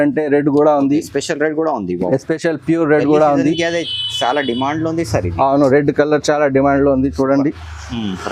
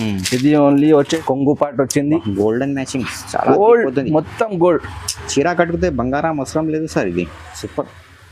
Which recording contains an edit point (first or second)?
second